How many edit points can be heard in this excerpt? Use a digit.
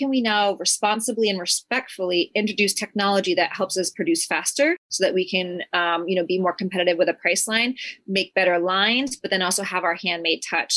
0